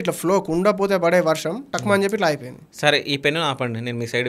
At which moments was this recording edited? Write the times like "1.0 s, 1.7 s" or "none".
none